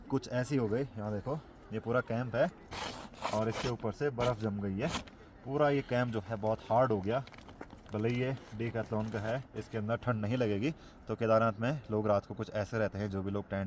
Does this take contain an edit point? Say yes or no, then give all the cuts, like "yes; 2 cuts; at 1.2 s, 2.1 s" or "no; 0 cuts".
no; 0 cuts